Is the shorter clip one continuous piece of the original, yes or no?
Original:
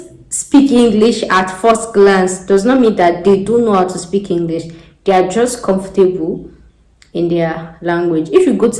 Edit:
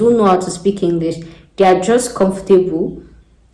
yes